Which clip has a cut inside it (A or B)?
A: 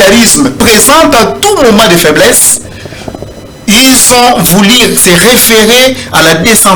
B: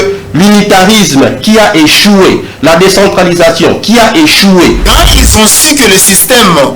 B